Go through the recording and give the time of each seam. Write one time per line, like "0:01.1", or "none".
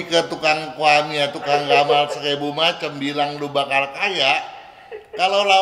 none